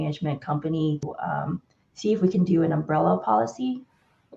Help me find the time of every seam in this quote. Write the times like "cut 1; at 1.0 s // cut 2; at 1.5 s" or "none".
cut 1; at 1.1 s